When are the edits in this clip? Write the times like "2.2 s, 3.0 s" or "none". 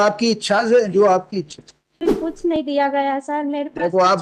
2.2 s